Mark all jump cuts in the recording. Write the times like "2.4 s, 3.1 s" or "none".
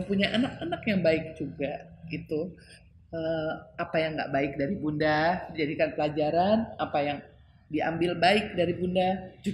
none